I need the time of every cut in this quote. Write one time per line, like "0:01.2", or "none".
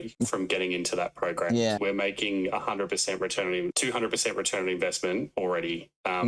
none